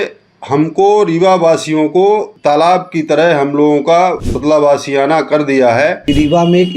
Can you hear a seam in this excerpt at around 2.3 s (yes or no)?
yes